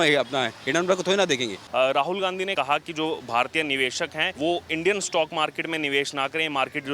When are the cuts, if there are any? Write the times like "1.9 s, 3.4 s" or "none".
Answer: 1.6 s, 2.5 s, 4.3 s